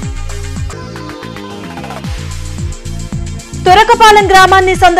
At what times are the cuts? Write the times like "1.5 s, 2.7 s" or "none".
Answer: 3.5 s